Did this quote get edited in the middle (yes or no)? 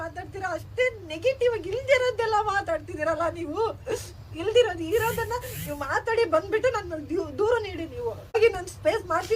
yes